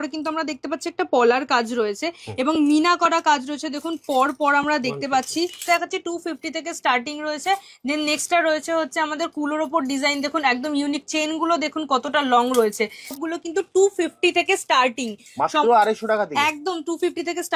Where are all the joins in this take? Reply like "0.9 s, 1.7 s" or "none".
5.6 s, 13.2 s